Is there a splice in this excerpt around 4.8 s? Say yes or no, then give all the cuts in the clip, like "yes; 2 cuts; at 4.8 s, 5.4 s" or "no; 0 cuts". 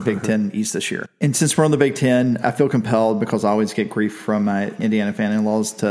yes; 3 cuts; at 1.0 s, 2.4 s, 4.8 s